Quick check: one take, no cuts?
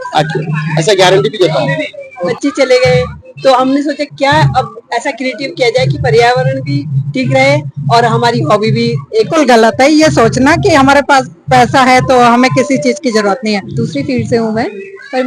no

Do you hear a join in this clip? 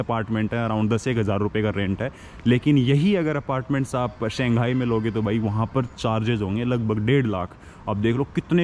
no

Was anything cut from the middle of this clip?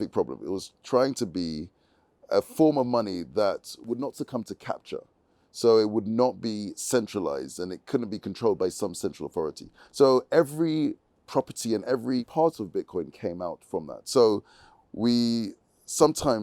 yes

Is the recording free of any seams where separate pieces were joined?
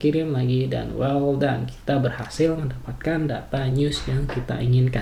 yes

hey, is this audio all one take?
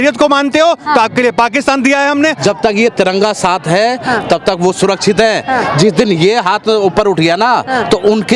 no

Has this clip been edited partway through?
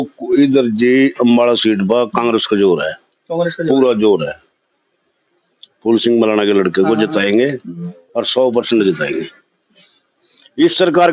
no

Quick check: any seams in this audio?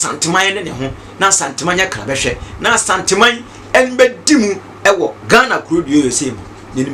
no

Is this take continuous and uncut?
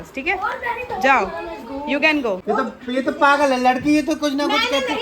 no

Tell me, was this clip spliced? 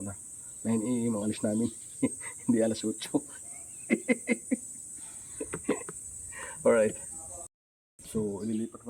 no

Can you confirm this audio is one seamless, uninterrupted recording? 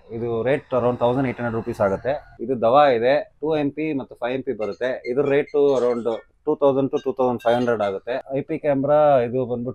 no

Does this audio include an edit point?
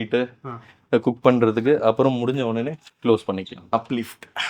yes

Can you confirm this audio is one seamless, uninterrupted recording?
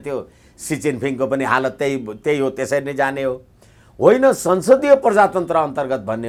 yes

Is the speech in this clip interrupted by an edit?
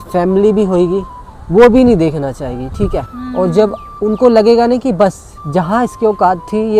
yes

